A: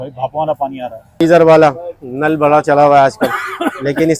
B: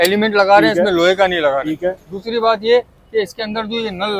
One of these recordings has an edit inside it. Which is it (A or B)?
A